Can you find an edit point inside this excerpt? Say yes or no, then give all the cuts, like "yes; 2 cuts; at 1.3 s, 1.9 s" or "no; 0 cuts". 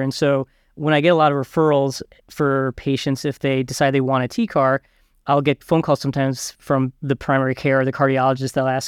yes; 2 cuts; at 5.2 s, 7.0 s